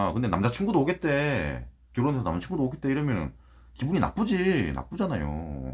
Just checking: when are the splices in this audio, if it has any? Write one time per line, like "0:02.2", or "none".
none